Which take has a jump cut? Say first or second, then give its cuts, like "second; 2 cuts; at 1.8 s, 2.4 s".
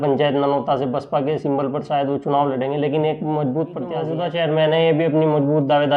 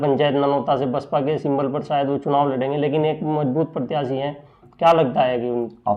first; 1 cut; at 4.1 s